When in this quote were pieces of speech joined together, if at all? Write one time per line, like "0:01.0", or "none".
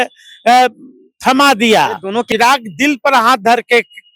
0:02.2